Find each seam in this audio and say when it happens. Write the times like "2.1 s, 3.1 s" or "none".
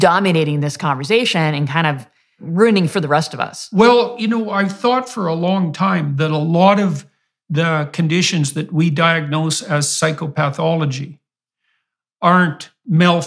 2.4 s